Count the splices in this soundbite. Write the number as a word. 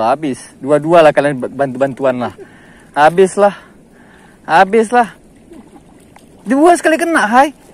zero